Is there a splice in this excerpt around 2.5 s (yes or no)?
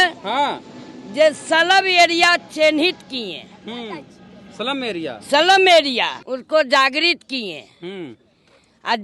no